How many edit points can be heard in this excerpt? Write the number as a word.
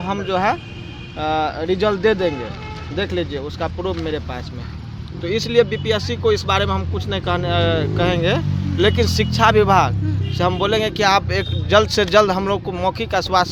zero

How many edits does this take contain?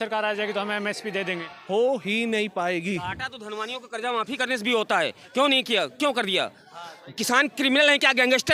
zero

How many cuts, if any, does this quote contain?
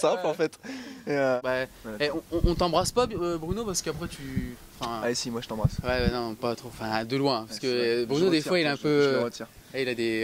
one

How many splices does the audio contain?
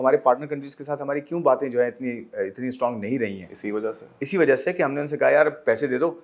zero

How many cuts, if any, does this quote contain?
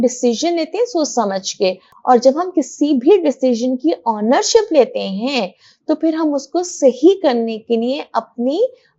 one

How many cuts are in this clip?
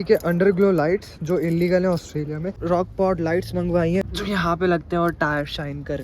two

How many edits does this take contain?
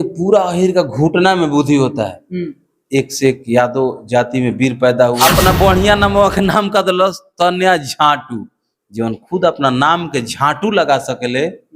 one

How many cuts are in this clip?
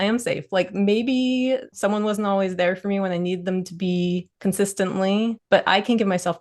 three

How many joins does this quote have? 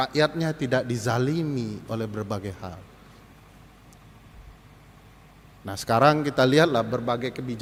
zero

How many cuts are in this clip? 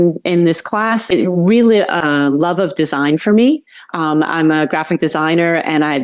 two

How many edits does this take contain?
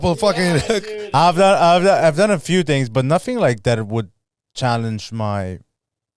zero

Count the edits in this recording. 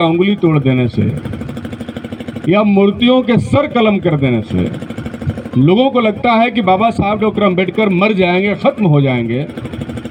zero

